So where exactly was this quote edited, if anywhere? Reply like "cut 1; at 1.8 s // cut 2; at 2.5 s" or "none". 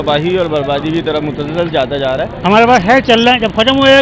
cut 1; at 2.3 s